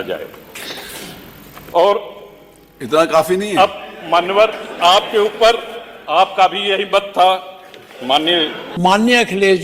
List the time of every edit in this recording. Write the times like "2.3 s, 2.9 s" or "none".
8.6 s